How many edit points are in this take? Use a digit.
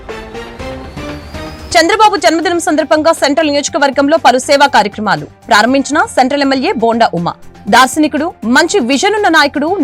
1